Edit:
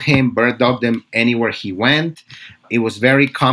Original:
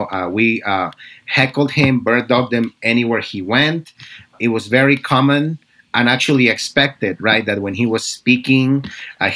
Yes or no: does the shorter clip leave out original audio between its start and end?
no